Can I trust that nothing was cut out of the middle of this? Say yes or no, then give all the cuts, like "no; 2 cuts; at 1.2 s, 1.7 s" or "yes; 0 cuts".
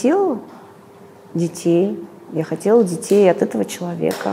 yes; 0 cuts